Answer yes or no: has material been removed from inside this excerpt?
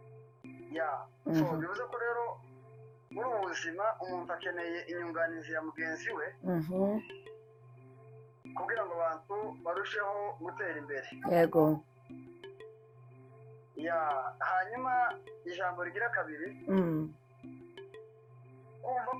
no